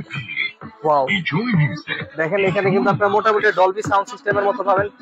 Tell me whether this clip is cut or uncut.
uncut